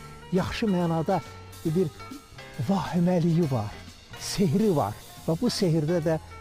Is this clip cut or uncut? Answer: uncut